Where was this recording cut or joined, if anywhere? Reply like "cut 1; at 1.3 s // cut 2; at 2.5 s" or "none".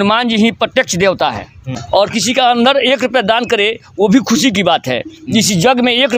cut 1; at 1.4 s